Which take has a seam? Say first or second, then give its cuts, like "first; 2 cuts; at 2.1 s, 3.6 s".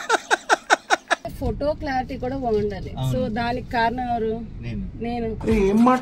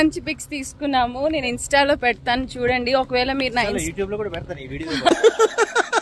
first; 1 cut; at 1.2 s